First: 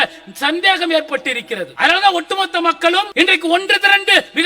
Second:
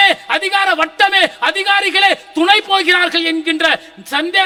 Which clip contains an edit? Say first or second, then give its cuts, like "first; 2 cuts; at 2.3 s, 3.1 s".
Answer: first; 2 cuts; at 1.7 s, 3.1 s